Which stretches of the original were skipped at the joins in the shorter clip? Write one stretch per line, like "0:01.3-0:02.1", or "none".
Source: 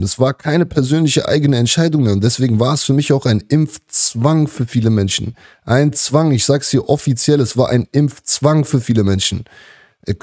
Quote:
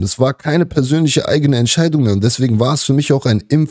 none